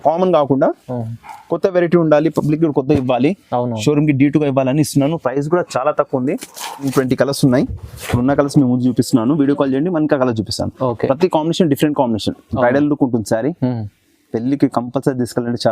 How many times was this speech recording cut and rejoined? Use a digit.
1